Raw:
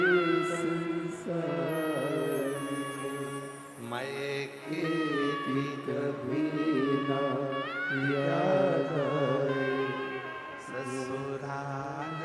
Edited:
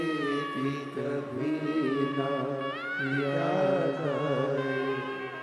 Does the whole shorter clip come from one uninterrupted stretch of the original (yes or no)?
yes